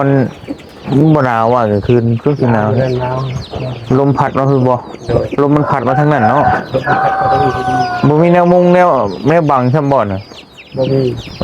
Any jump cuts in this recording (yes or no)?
no